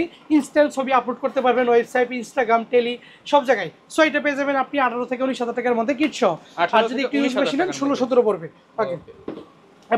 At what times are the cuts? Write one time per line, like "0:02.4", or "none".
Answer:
none